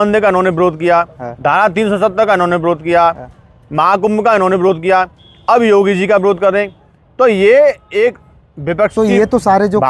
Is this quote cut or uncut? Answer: uncut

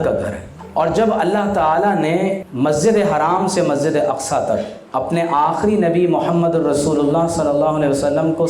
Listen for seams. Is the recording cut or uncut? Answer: cut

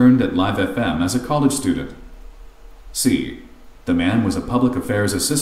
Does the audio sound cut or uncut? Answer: cut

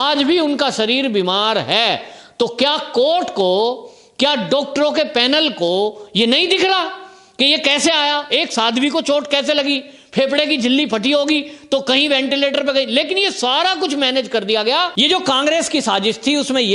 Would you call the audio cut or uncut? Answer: cut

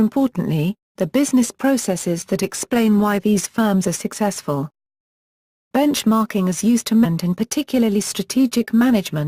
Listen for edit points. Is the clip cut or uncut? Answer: uncut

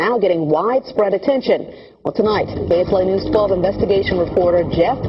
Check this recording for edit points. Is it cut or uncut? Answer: cut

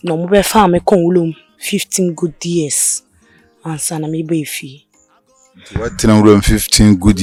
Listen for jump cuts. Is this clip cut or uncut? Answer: uncut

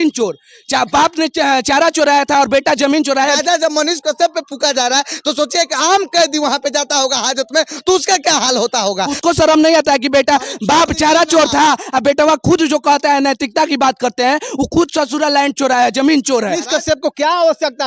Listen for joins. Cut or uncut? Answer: cut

